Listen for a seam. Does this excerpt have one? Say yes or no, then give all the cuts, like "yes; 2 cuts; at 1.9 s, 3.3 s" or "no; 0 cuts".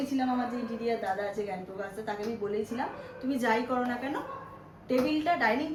no; 0 cuts